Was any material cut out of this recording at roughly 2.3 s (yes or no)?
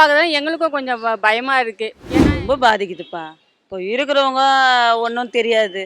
yes